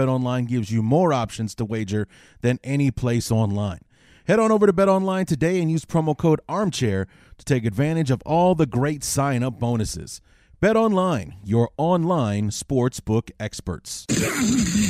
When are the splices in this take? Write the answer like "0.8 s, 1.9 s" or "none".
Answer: 13.9 s